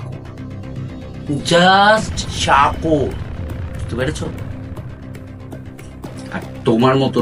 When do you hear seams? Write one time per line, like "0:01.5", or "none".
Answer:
none